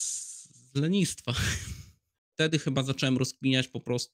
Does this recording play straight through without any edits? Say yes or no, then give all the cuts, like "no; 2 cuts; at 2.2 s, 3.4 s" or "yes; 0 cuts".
no; 1 cut; at 2.3 s